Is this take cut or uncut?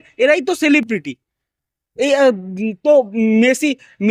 uncut